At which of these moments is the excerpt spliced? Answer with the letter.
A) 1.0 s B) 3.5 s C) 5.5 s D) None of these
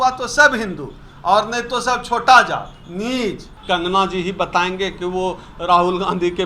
B